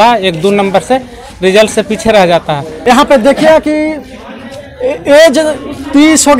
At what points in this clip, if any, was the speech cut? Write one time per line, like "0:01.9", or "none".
0:02.7